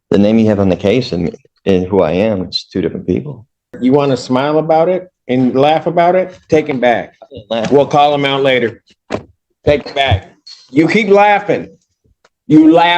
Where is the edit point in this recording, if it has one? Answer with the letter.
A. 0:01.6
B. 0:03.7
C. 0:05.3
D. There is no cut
B